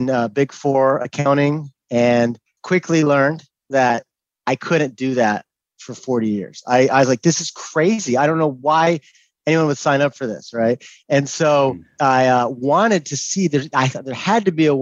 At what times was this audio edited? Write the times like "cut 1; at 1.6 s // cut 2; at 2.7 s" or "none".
none